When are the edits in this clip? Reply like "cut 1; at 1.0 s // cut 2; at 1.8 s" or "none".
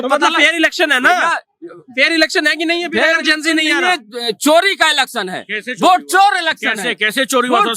none